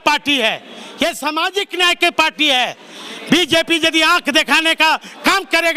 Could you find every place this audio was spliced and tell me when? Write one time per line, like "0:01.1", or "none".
none